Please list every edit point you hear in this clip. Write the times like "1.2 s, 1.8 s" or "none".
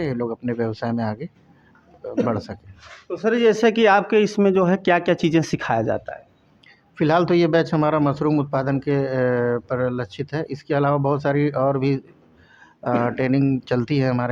none